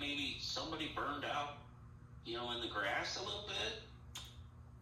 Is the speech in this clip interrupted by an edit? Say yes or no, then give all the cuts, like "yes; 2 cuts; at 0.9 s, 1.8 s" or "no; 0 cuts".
no; 0 cuts